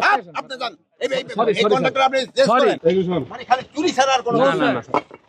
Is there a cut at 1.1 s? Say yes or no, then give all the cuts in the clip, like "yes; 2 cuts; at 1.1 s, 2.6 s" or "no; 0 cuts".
no; 1 cut; at 2.8 s